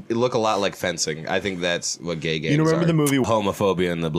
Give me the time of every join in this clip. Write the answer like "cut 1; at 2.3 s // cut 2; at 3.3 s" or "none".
cut 1; at 3.3 s